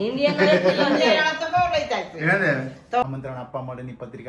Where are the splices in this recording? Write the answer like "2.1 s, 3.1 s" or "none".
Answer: 3.0 s